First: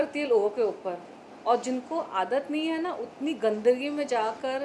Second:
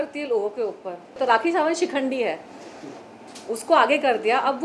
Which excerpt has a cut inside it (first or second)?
second